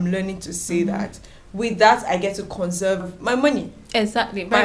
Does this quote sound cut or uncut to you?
cut